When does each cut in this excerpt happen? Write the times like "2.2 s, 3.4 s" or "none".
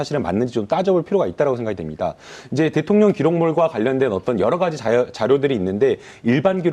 1.2 s

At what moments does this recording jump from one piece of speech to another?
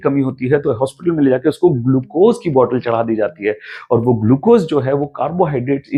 none

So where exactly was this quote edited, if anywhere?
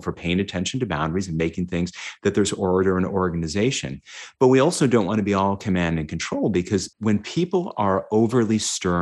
7.0 s

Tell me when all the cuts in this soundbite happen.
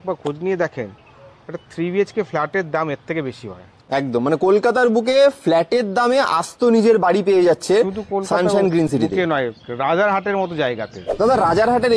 3.8 s, 11.0 s

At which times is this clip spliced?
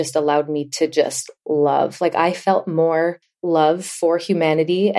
3.3 s

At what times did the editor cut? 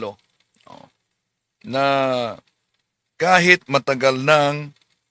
none

